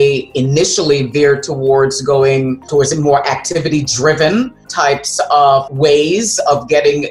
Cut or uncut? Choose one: uncut